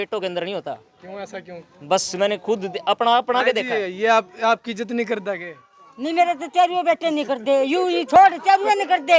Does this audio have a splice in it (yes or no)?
no